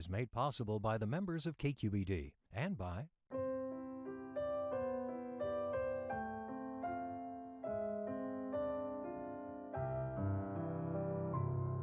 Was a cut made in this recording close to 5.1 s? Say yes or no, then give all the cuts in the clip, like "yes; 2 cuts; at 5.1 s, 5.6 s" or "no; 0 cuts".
no; 1 cut; at 3.2 s